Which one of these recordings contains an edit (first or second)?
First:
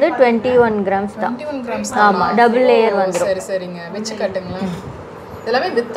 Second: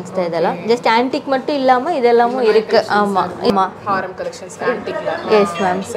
second